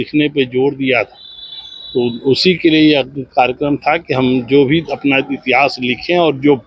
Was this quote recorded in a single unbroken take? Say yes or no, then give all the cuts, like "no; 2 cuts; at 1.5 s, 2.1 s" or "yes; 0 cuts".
yes; 0 cuts